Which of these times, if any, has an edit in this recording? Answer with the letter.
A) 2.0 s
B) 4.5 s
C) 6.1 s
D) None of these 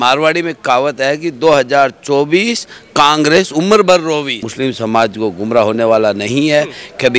B